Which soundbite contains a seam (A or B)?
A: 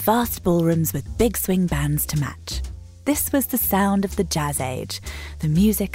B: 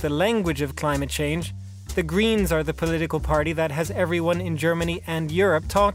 A